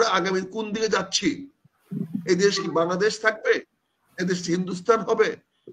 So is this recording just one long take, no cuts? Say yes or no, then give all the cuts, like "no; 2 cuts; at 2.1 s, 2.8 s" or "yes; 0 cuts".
yes; 0 cuts